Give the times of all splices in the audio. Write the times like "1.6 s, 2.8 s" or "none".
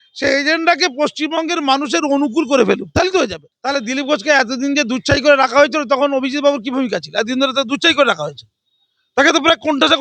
3.5 s

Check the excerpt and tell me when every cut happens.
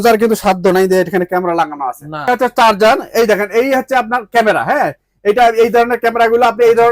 2.3 s

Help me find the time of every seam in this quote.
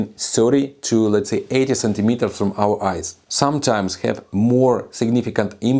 3.2 s

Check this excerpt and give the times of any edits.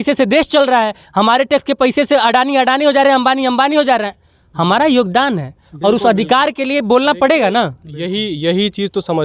none

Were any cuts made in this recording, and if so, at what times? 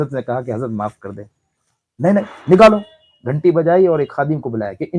none

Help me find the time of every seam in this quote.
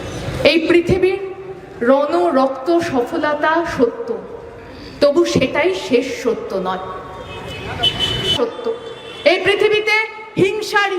8.3 s

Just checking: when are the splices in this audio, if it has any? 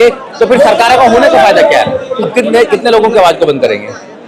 2.3 s

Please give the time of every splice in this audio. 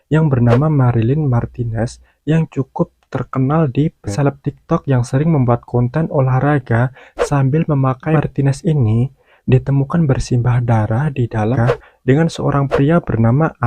4.1 s, 8.2 s, 11.6 s

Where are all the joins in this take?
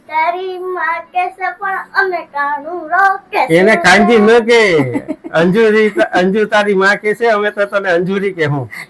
none

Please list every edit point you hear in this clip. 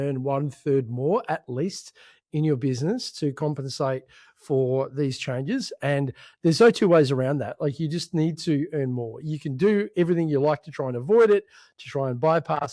none

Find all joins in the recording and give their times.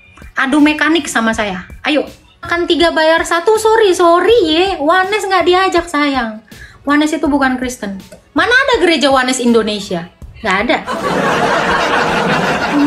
2.5 s

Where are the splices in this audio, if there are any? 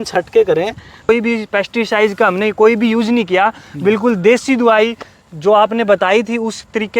1.1 s

